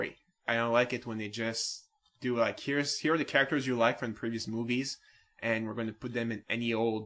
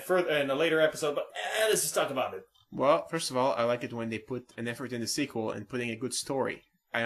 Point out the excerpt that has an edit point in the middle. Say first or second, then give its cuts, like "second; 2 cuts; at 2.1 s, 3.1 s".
first; 1 cut; at 4.4 s